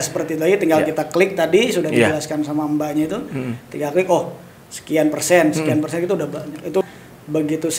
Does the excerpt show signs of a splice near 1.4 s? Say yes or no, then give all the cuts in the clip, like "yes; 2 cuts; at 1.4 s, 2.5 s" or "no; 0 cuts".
no; 1 cut; at 6.8 s